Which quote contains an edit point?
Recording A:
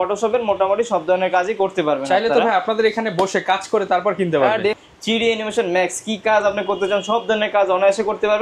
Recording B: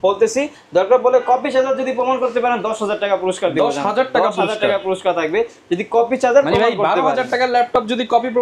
A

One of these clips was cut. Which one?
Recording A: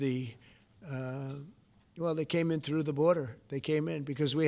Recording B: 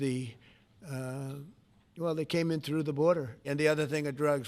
B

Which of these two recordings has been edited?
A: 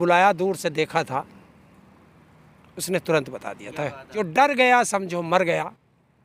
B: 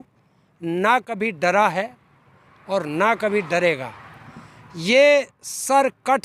A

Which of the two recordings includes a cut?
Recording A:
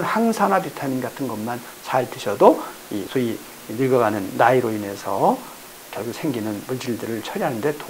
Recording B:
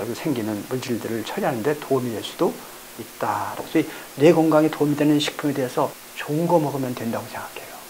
B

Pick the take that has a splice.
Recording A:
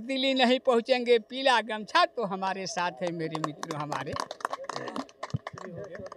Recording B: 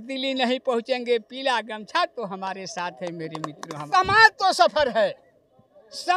B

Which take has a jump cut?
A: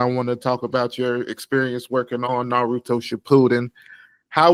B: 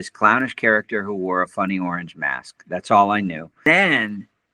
B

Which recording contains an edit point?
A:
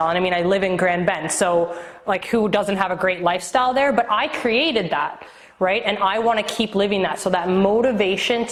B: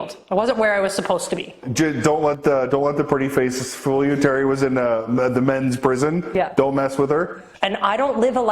B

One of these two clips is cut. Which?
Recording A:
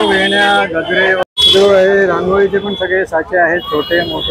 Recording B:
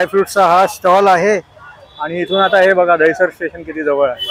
A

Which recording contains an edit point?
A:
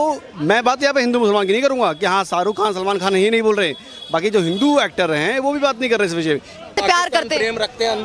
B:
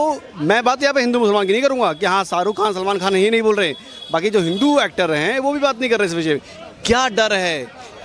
A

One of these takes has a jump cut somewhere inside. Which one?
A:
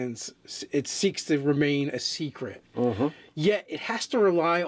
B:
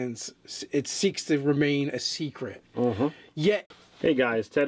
A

